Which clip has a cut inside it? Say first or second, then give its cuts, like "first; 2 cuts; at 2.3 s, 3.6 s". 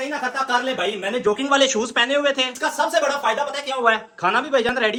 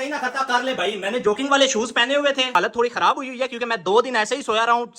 second; 1 cut; at 2.6 s